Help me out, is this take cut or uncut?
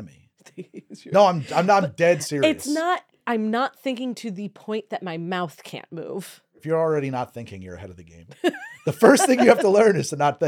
cut